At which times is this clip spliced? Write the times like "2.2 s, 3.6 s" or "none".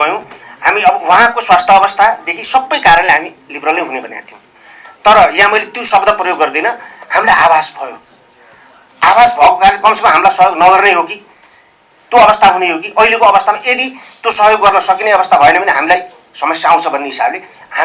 none